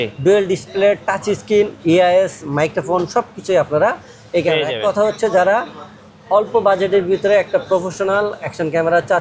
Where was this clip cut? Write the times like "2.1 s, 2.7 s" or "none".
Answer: none